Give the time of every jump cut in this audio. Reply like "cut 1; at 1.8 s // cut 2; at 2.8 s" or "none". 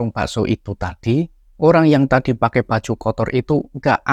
none